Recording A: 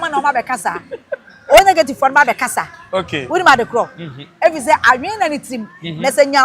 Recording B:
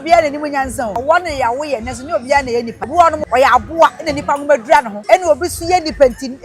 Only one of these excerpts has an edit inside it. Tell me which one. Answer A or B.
B